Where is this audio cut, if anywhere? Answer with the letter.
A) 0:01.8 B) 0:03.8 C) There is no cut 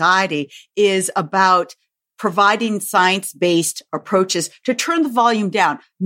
C